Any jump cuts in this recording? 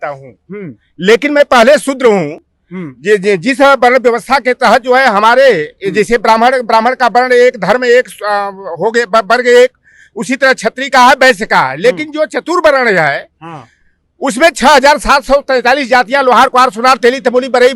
no; 0 cuts

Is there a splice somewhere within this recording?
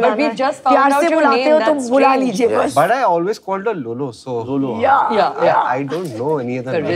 no; 0 cuts

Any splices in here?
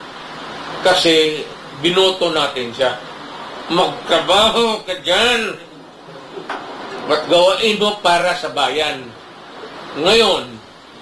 no; 0 cuts

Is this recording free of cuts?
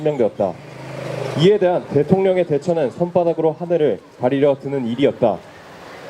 no; 1 cut; at 4.2 s

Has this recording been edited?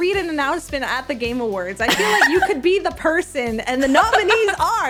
no; 0 cuts

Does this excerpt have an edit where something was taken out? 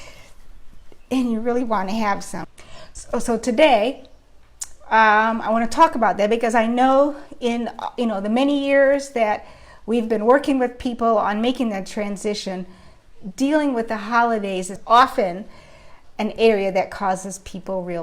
yes; 2 cuts; at 2.4 s, 14.8 s

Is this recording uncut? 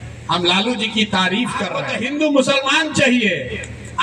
no; 1 cut; at 1.8 s

